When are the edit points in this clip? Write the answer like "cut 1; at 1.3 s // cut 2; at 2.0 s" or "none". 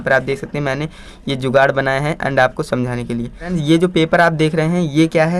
none